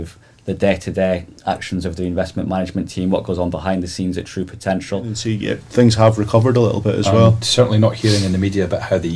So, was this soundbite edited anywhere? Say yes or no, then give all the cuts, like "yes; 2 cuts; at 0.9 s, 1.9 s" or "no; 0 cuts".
yes; 1 cut; at 5.3 s